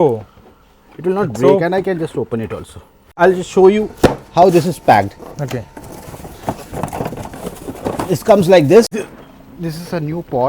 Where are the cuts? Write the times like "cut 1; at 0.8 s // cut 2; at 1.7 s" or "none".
cut 1; at 3.1 s // cut 2; at 9.0 s